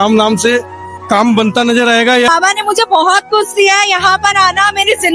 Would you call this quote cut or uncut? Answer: cut